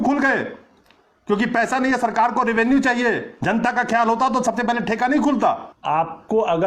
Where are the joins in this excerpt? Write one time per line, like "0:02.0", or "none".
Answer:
0:05.7